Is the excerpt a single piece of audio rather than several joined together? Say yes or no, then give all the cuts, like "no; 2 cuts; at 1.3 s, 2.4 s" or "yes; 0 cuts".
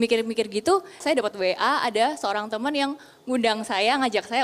no; 1 cut; at 1.0 s